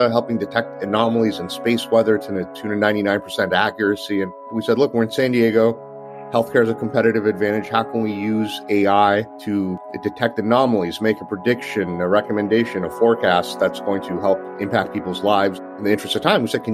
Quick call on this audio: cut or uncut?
cut